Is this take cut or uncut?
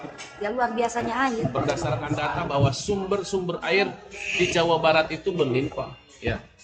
cut